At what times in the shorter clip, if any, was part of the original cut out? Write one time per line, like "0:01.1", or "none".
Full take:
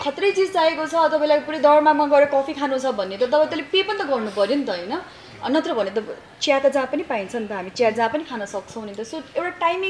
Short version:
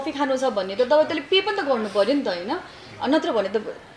none